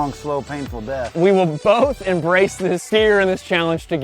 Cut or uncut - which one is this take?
cut